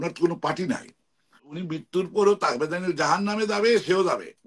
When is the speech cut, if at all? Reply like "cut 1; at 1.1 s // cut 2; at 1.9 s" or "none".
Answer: cut 1; at 1.5 s